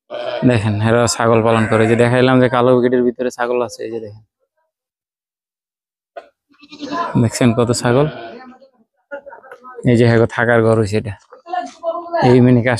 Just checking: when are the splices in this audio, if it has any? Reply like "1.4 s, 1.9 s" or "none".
none